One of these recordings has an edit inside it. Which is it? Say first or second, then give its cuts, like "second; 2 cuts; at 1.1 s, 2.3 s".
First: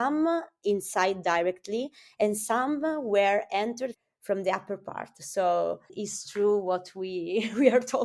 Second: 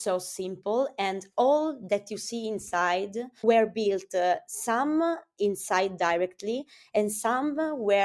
first; 1 cut; at 5.9 s